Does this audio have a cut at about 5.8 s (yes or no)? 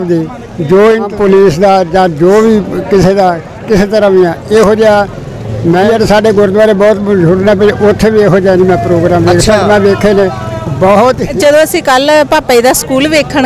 yes